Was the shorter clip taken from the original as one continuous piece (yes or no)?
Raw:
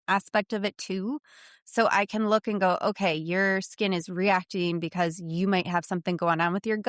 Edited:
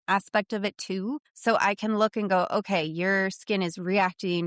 no